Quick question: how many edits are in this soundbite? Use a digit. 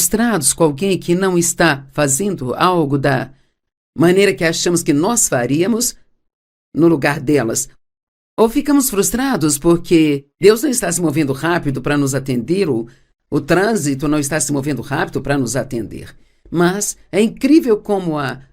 1